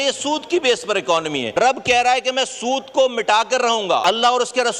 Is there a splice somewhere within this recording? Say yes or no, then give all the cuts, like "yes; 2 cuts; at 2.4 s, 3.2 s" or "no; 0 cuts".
yes; 2 cuts; at 1.6 s, 4.0 s